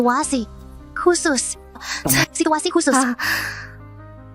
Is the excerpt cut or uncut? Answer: uncut